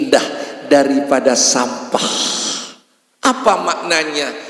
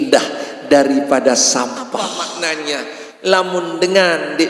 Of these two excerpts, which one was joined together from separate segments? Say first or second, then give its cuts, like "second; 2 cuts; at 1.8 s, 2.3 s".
second; 1 cut; at 2.2 s